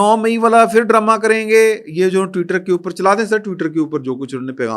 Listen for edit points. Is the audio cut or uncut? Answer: uncut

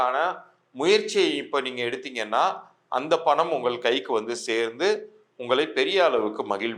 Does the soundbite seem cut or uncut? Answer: uncut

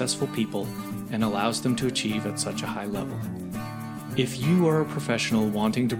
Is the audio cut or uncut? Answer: uncut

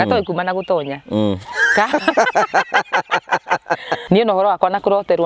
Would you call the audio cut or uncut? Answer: cut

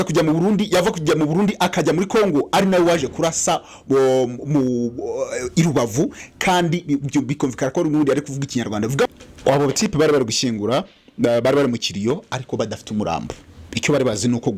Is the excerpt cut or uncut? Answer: cut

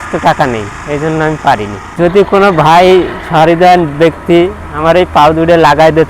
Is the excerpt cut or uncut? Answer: cut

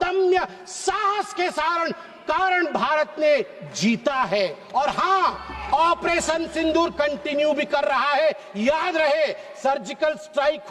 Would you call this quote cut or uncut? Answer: uncut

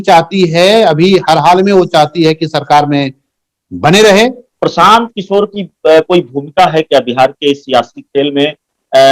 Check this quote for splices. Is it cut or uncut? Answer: cut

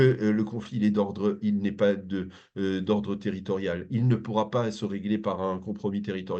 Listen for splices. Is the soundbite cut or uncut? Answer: uncut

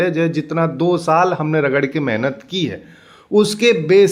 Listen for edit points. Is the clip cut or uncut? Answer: uncut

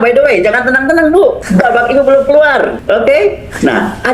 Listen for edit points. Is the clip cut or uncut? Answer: cut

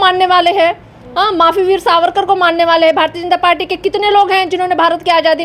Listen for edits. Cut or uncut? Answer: uncut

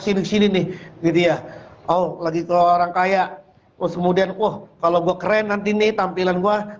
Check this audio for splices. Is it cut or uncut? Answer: uncut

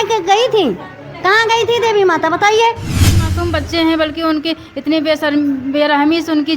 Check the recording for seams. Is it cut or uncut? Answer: cut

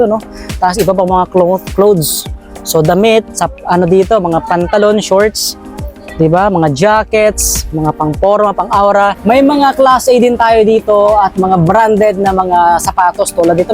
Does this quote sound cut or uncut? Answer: cut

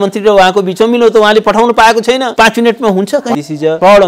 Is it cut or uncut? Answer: cut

